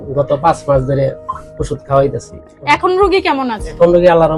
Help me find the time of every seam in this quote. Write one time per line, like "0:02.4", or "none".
none

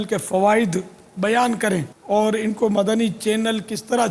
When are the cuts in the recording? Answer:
0:01.9

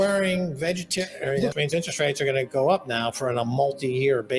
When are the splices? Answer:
0:01.5

